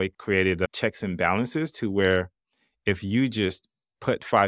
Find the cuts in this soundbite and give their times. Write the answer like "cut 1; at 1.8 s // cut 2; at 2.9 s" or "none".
none